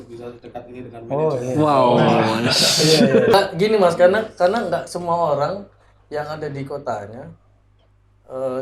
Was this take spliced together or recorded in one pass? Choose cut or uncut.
cut